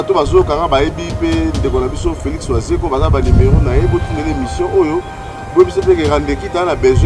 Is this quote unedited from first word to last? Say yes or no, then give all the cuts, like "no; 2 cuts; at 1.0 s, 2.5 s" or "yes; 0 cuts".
yes; 0 cuts